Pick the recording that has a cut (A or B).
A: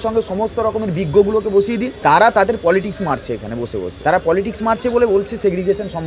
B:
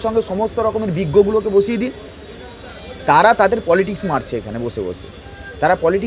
A